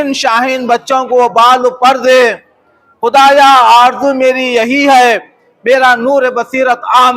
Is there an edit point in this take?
no; 0 cuts

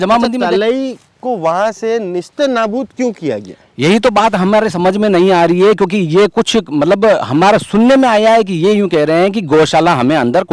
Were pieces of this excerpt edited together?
no; 0 cuts

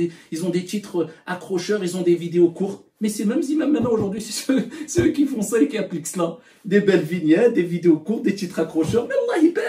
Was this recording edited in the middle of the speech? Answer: no; 0 cuts

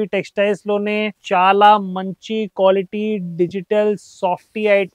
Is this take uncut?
no; 1 cut; at 1.2 s

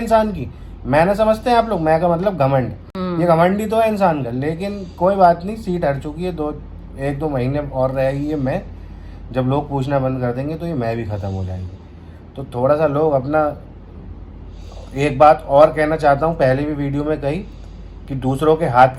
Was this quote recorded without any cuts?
yes; 0 cuts

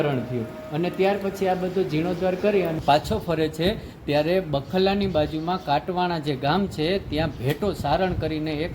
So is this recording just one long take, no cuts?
no; 1 cut; at 2.8 s

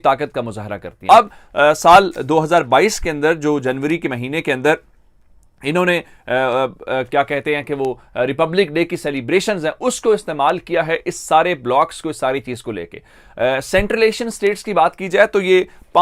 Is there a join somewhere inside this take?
no; 0 cuts

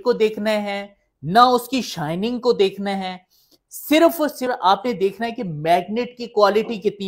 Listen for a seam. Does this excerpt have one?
yes; 1 cut; at 4.5 s

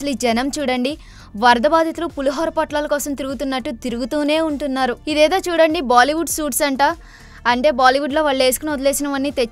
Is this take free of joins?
yes; 0 cuts

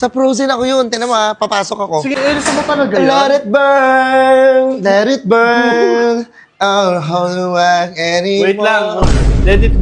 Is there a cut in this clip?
yes; 1 cut; at 2.1 s

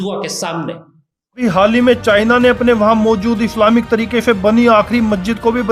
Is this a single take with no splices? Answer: no; 1 cut; at 1.4 s

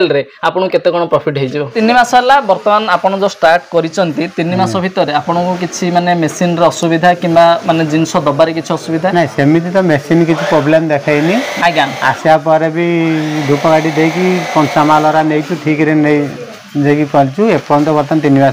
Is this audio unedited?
no; 1 cut; at 1.7 s

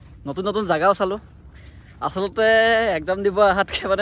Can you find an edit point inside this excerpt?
no; 0 cuts

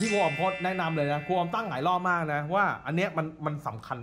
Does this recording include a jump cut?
no; 0 cuts

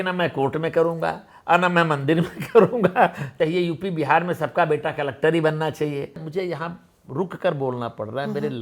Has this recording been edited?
yes; 2 cuts; at 3.3 s, 6.2 s

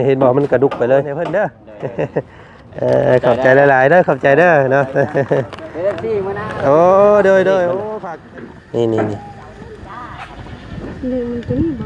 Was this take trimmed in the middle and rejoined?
yes; 2 cuts; at 1.2 s, 7.9 s

